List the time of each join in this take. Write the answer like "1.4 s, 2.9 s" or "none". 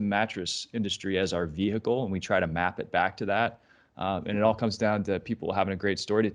none